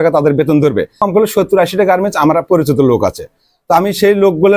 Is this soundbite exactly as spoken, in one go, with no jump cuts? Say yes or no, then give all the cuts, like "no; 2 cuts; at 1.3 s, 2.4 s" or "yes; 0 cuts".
no; 1 cut; at 1.0 s